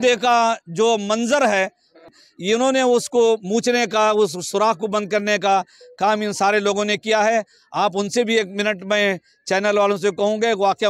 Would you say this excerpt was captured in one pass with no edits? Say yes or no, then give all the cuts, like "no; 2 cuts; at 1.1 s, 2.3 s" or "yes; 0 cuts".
no; 1 cut; at 2.2 s